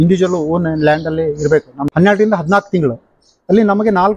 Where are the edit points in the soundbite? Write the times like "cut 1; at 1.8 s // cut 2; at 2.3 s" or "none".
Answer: cut 1; at 1.8 s